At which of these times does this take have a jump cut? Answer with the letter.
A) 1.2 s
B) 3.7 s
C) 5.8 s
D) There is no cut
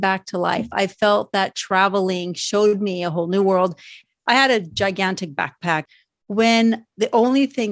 C